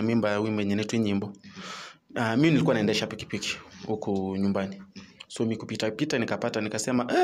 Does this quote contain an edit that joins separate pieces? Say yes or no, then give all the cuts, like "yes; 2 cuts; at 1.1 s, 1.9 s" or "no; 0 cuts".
no; 0 cuts